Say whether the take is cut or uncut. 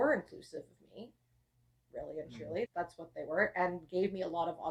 uncut